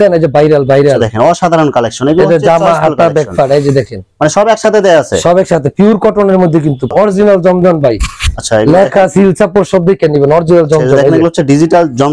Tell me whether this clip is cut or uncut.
cut